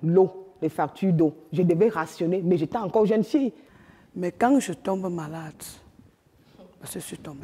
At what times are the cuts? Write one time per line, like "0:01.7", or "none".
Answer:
0:03.6